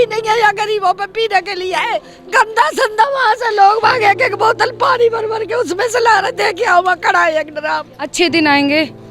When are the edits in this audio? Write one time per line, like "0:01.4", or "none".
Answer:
0:02.1
0:08.0